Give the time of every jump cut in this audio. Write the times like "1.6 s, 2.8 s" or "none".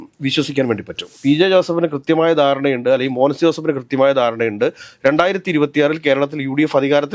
1.1 s